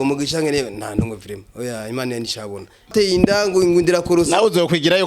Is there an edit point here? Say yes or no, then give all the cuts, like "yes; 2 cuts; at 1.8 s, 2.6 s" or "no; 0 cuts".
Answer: yes; 1 cut; at 2.9 s